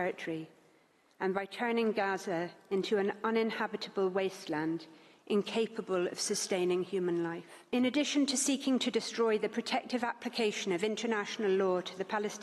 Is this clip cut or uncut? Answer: cut